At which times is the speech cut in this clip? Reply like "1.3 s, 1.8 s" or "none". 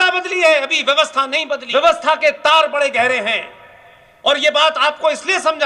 1.6 s